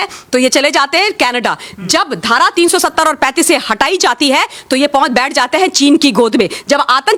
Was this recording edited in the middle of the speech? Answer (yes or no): no